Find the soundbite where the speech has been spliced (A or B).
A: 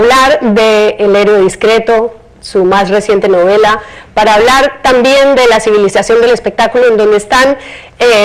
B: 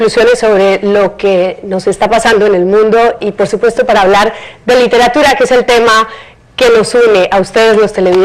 B